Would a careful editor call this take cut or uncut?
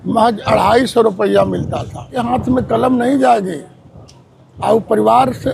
cut